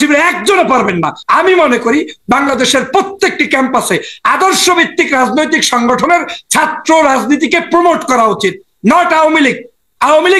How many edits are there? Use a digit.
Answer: 1